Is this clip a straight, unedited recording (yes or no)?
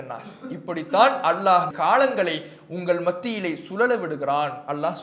no